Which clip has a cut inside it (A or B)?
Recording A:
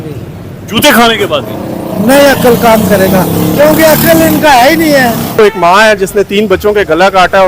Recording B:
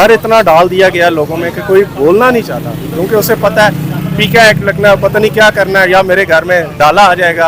A